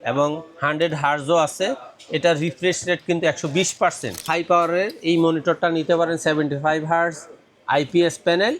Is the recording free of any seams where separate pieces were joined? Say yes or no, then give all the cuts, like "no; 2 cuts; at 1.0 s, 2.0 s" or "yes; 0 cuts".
no; 1 cut; at 4.3 s